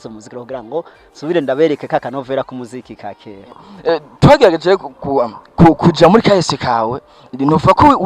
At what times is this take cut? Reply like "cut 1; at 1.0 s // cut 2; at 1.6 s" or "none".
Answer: cut 1; at 3.7 s